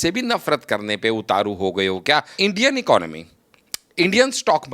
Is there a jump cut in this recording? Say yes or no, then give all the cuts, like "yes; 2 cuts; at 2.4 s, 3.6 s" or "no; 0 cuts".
yes; 1 cut; at 2.3 s